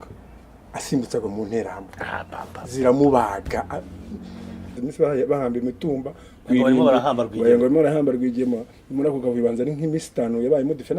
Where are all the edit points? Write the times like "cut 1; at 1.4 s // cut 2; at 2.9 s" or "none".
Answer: cut 1; at 4.8 s

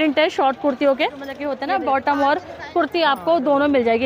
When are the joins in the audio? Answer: cut 1; at 1.4 s

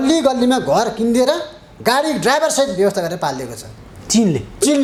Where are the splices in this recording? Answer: none

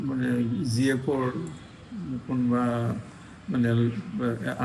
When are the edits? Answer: none

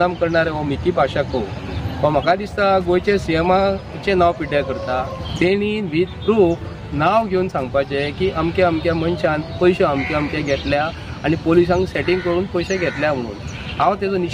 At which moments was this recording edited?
cut 1; at 5.2 s

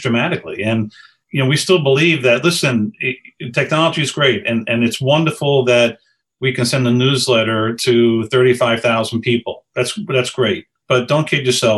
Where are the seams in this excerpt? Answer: cut 1; at 1.2 s // cut 2; at 10.8 s

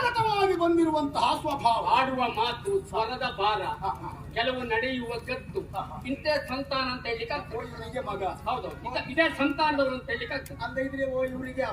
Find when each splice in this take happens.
none

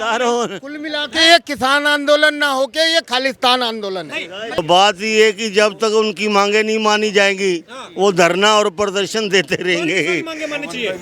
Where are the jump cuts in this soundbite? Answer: cut 1; at 4.6 s

